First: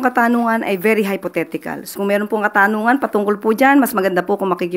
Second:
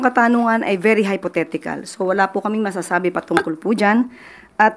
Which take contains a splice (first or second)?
first